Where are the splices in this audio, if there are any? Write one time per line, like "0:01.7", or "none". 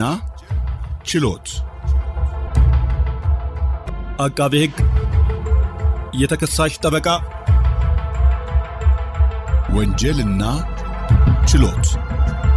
0:01.5